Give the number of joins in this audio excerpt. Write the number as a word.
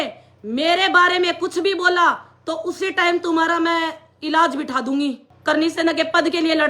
one